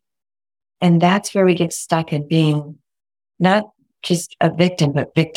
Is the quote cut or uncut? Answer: uncut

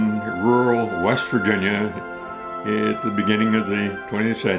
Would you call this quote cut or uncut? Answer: uncut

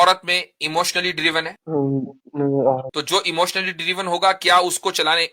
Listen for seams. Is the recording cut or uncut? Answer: cut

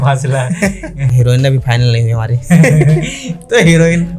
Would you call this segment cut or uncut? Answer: cut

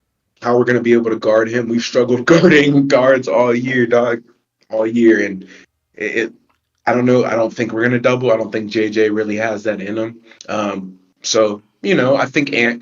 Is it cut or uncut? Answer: uncut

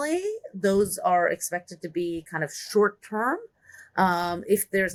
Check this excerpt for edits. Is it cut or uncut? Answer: uncut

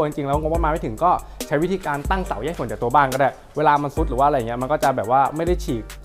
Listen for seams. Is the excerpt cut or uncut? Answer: uncut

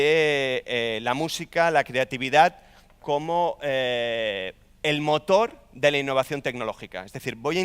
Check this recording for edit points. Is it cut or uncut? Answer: uncut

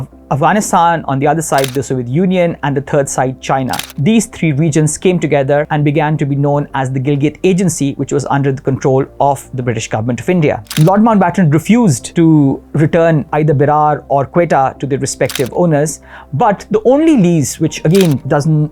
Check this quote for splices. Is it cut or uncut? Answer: cut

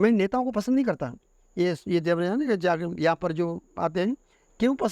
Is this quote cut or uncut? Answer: uncut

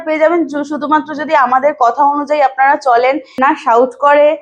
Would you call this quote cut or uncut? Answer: cut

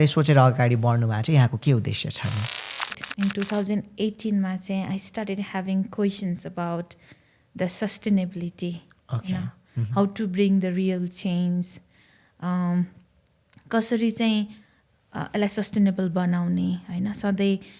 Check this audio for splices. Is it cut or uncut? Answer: cut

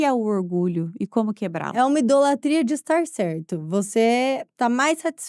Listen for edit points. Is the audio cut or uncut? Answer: cut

